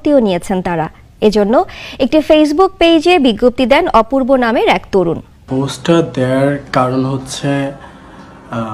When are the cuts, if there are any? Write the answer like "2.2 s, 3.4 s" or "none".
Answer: 5.3 s